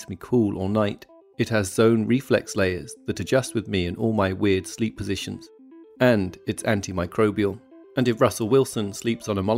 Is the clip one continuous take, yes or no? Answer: no